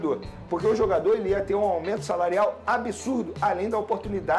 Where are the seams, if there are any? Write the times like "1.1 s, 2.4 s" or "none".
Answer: none